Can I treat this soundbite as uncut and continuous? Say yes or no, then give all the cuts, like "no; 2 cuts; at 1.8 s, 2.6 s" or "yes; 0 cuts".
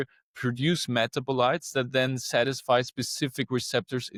yes; 0 cuts